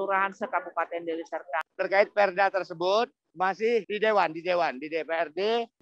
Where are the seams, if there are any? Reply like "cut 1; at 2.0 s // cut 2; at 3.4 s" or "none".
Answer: cut 1; at 1.7 s